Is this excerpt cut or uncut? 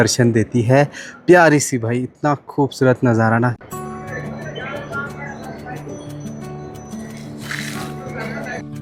uncut